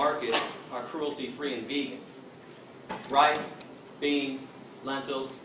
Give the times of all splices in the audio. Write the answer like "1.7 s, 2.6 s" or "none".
4.5 s